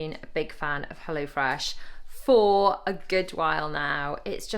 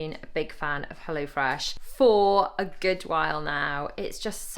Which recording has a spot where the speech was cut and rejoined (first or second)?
second